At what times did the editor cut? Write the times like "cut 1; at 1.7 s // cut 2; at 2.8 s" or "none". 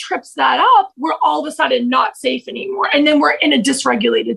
none